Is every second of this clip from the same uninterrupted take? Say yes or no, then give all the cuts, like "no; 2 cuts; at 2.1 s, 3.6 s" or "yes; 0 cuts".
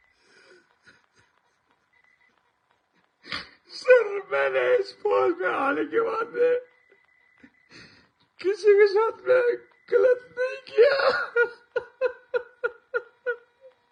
yes; 0 cuts